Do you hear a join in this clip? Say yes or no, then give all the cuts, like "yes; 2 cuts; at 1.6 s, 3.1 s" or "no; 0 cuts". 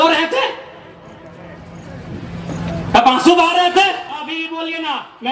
yes; 1 cut; at 4.2 s